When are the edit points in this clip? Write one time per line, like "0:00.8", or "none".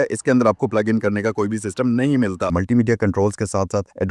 0:02.5